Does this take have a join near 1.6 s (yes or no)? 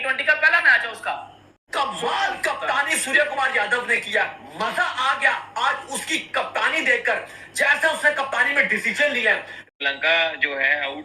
yes